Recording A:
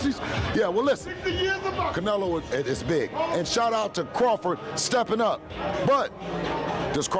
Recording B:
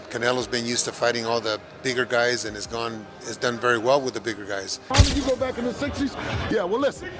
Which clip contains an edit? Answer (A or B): B